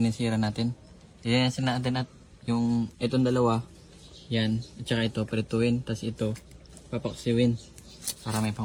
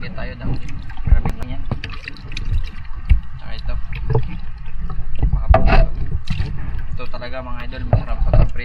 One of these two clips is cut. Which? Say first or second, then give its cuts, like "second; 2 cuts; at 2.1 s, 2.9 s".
second; 1 cut; at 1.4 s